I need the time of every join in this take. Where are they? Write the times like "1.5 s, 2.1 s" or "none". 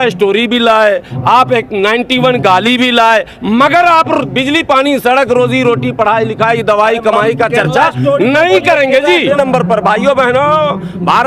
9.3 s